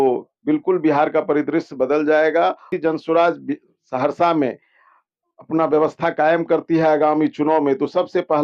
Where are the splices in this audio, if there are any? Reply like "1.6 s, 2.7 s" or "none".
2.8 s

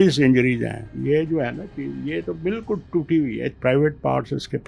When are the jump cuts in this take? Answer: 0.9 s, 3.5 s

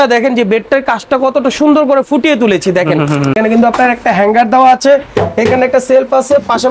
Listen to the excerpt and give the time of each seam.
3.3 s

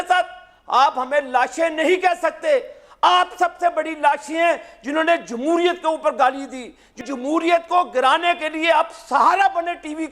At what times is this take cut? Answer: 7.0 s

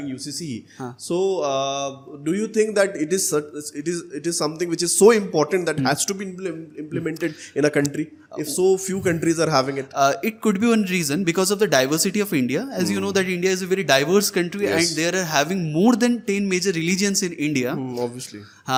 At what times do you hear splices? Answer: none

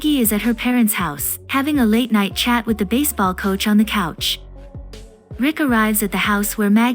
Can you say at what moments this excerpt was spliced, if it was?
4.6 s

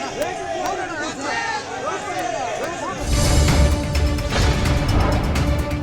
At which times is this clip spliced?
2.3 s

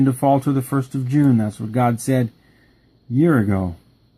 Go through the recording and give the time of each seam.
3.0 s

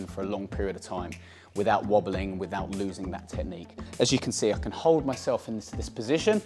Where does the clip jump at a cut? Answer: none

